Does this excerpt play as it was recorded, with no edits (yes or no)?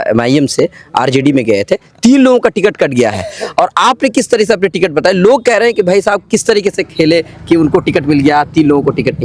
yes